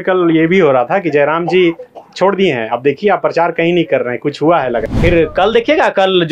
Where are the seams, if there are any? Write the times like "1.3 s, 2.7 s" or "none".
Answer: 4.9 s